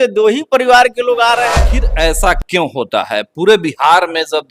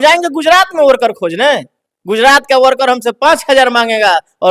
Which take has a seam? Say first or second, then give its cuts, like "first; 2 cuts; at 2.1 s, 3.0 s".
first; 1 cut; at 1.8 s